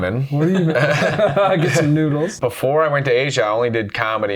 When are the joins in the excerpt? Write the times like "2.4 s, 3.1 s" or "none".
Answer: 2.3 s